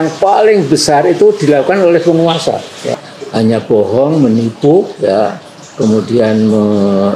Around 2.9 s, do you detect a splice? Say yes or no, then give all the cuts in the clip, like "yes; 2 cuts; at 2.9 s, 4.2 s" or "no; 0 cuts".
yes; 1 cut; at 2.9 s